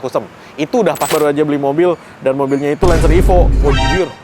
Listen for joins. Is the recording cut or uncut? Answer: cut